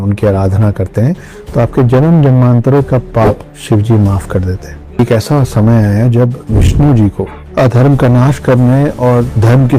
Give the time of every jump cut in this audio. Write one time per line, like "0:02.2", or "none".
0:03.5
0:05.0